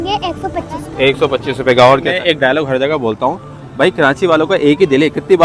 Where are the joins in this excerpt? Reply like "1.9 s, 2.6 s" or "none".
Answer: 2.1 s